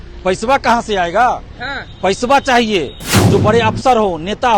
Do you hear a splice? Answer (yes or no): yes